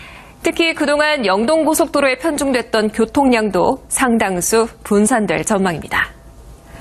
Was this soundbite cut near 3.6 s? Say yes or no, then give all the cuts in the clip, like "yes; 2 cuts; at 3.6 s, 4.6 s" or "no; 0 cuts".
no; 1 cut; at 5.5 s